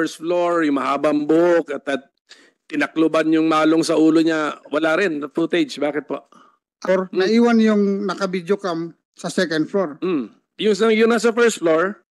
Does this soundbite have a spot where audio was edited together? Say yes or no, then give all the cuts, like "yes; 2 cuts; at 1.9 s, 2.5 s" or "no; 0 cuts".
yes; 1 cut; at 6.9 s